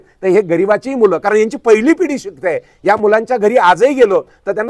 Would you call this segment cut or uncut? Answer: uncut